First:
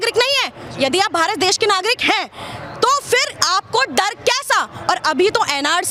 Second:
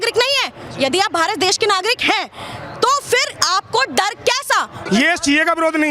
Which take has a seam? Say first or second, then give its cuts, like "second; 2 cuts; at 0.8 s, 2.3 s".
second; 1 cut; at 4.8 s